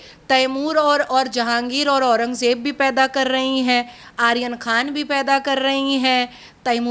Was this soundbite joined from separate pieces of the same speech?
no; 0 cuts

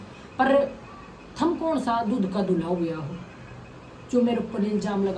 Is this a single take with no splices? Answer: yes; 0 cuts

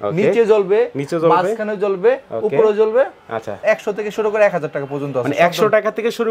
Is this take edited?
yes; 1 cut; at 3.5 s

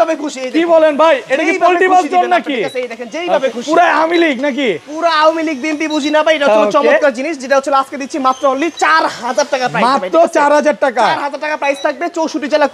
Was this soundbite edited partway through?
no; 0 cuts

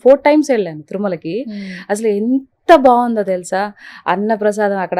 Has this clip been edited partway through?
no; 0 cuts

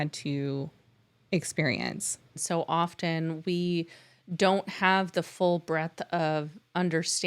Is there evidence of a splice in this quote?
yes; 1 cut; at 2.4 s

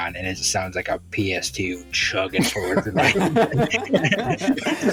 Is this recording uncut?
yes; 0 cuts

